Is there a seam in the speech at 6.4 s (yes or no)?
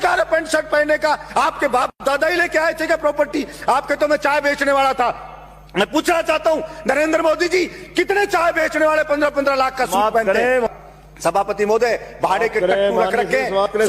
no